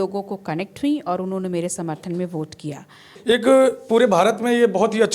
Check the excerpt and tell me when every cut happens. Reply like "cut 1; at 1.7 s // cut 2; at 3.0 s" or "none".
cut 1; at 3.1 s